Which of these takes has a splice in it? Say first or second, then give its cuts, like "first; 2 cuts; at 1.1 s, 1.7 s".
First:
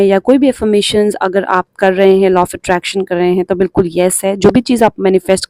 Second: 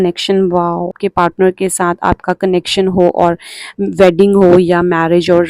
second; 1 cut; at 1.0 s